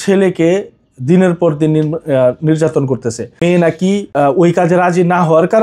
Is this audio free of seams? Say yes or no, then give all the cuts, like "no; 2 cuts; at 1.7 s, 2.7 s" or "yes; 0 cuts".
no; 2 cuts; at 3.4 s, 4.1 s